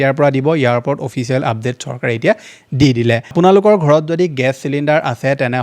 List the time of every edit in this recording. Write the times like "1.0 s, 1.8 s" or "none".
3.3 s